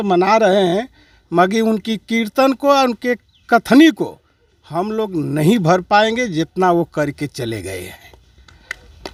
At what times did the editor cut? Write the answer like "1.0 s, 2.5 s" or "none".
none